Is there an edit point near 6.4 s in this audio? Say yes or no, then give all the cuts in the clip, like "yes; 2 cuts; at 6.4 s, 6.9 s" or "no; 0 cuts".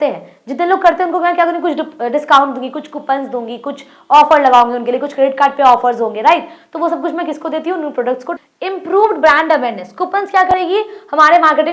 no; 1 cut; at 8.4 s